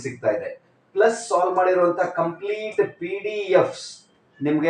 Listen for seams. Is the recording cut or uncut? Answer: uncut